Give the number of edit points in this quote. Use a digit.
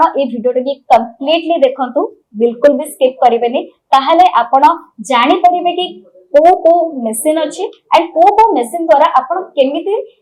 0